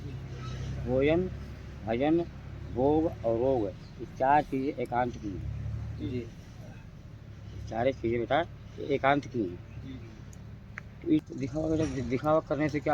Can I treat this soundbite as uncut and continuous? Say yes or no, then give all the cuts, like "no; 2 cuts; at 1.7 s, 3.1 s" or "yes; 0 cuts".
no; 1 cut; at 11.2 s